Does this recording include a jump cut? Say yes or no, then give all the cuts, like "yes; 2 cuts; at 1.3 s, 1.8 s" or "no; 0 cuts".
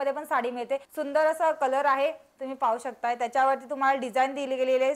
yes; 1 cut; at 0.9 s